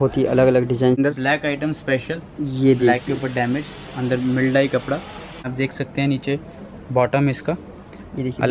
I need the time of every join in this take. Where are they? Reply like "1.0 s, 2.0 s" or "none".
1.0 s, 5.5 s